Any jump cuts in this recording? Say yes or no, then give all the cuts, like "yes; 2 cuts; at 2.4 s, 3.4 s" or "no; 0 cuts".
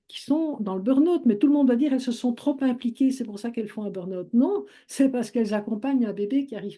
no; 0 cuts